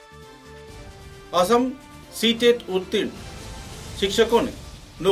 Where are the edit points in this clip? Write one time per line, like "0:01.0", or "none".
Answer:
0:01.0

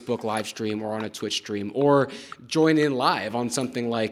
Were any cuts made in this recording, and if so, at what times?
none

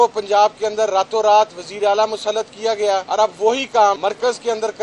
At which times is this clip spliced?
0:03.1
0:04.0

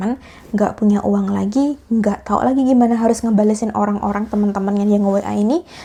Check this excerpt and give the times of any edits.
none

